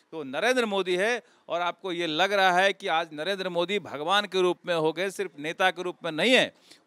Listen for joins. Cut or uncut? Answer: uncut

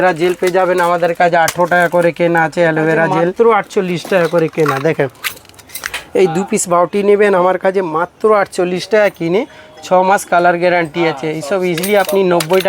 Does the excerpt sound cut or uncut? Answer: cut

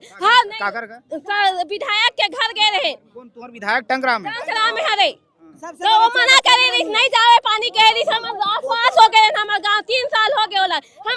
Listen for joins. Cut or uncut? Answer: uncut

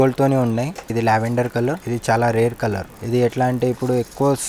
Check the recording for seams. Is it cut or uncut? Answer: cut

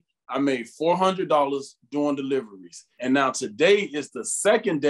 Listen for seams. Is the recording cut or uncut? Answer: cut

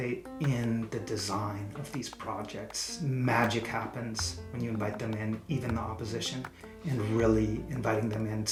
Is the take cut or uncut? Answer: uncut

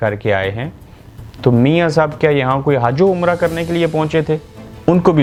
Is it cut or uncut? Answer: uncut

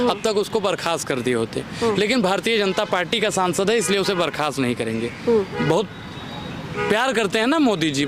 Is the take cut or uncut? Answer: uncut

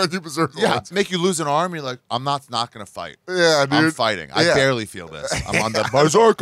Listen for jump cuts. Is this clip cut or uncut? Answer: cut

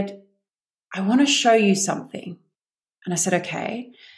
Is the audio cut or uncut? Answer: uncut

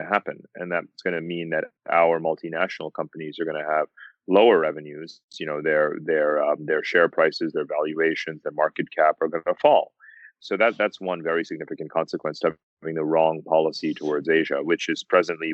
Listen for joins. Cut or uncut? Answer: uncut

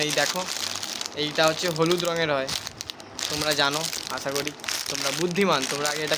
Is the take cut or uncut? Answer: uncut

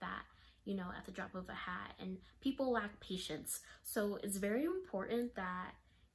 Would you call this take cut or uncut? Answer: uncut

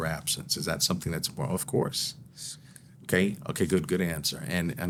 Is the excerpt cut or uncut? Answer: uncut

